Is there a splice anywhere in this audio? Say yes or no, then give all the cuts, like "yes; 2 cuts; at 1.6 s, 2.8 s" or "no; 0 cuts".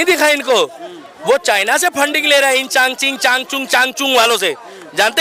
no; 0 cuts